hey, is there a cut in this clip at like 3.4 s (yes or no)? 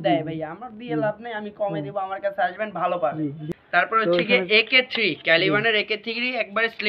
yes